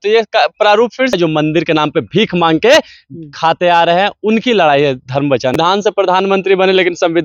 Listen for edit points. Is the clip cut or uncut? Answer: cut